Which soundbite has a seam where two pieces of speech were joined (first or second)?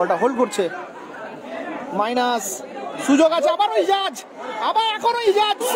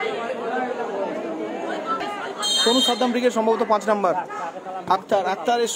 second